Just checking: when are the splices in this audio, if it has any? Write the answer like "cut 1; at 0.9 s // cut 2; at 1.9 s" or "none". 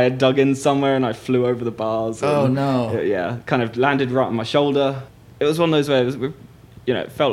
cut 1; at 5.1 s